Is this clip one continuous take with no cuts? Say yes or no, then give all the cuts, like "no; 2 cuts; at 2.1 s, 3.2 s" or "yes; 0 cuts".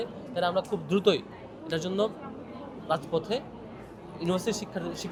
yes; 0 cuts